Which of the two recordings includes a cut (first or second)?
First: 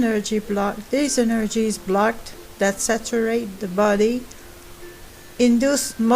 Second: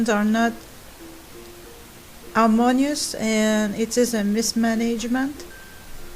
second